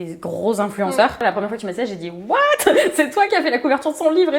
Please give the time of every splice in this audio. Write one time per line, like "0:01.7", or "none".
0:01.2